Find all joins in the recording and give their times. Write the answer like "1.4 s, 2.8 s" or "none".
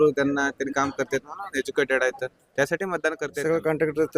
3.3 s